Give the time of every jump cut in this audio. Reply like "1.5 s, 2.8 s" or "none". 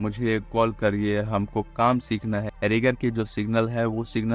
2.5 s